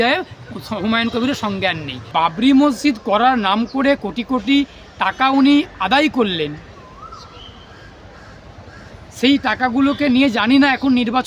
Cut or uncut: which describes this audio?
cut